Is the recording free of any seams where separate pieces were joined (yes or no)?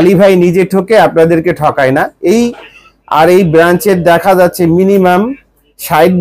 yes